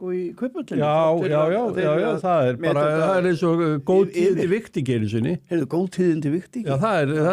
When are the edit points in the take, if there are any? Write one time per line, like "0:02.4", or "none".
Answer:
none